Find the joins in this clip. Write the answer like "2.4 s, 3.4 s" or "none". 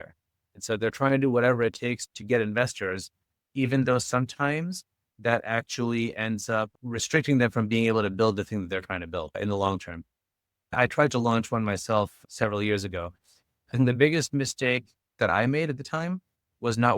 10.7 s, 15.1 s